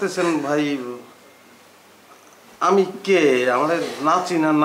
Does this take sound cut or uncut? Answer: uncut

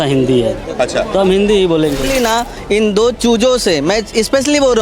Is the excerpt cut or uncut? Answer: cut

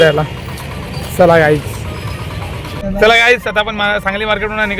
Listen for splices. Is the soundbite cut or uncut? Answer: cut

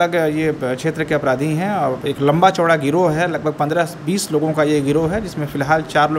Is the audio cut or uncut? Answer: uncut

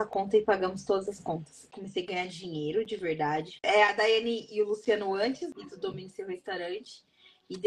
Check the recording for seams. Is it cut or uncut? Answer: cut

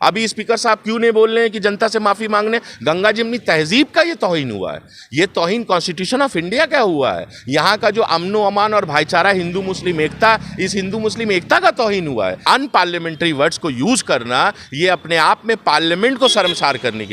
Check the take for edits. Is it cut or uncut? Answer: cut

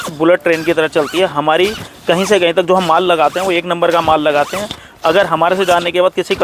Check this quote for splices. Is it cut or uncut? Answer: uncut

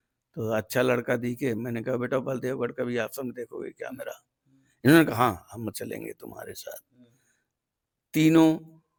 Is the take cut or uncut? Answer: uncut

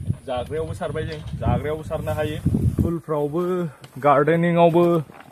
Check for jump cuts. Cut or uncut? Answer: cut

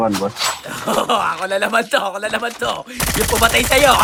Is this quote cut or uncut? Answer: uncut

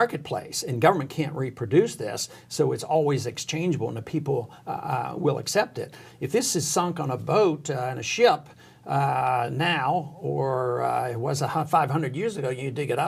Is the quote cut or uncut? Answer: uncut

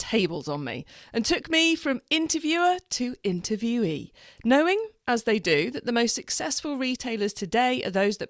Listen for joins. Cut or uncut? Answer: uncut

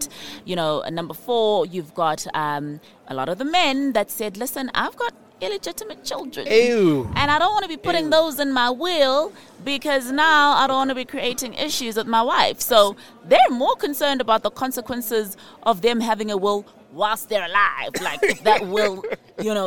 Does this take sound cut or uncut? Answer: uncut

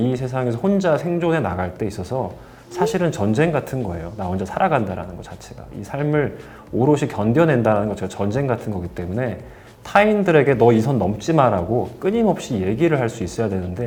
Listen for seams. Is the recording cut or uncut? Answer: uncut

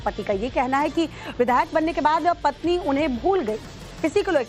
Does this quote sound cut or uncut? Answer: cut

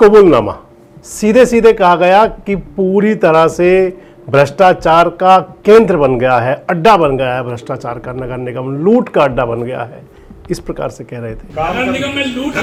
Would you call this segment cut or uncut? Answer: uncut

